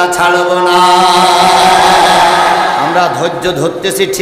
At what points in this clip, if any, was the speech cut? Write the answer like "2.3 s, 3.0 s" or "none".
2.9 s

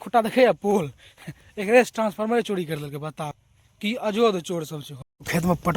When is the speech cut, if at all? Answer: 4.8 s

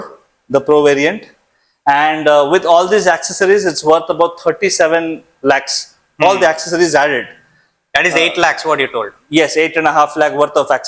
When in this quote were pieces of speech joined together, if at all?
none

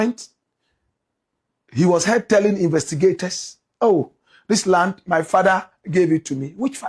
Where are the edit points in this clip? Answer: none

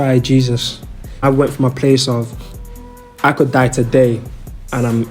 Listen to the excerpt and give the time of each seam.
1.1 s

